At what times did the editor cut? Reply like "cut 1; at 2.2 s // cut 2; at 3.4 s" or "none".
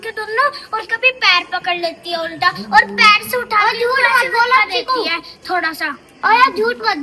none